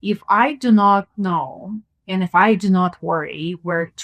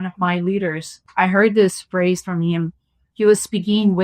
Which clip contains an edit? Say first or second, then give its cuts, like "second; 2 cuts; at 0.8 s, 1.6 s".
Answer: second; 1 cut; at 1.0 s